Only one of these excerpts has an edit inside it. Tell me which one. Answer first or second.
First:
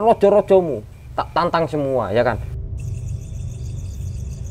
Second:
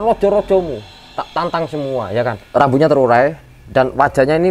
second